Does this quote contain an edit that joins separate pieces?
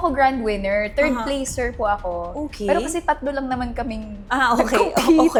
no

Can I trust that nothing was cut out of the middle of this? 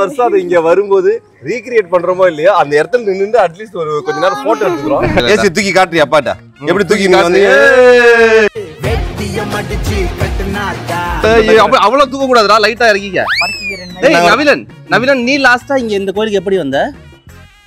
no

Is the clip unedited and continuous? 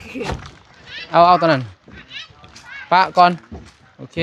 yes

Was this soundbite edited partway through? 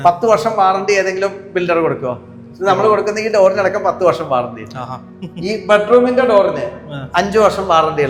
no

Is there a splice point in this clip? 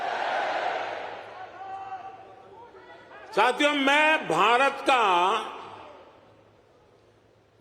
yes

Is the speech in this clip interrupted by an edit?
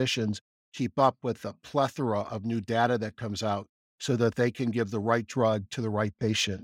no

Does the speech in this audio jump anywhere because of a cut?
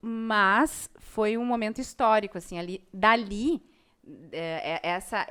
no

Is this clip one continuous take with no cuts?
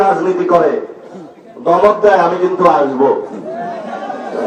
yes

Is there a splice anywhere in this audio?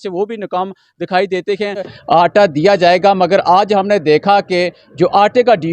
yes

